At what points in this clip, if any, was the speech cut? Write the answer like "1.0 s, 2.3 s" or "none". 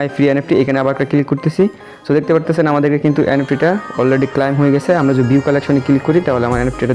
none